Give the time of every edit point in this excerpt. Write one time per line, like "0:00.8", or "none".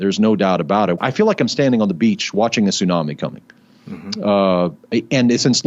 0:01.0

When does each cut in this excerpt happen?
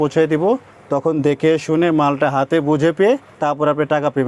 none

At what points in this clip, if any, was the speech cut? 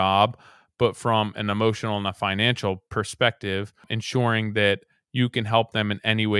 0:04.0

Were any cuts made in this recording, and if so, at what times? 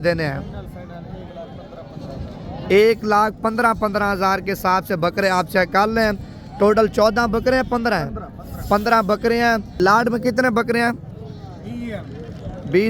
0:09.8

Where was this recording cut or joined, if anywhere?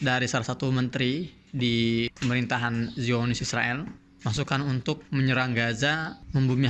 none

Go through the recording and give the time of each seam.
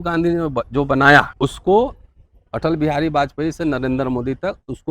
0:01.3

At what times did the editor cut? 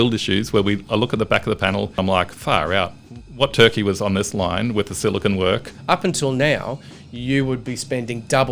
0:02.0
0:05.7

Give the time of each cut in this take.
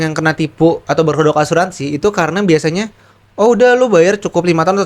none

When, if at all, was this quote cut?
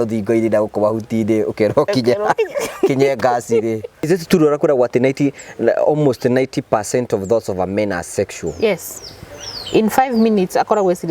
0:04.1

